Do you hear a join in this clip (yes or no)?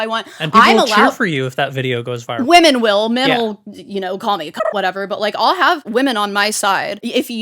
no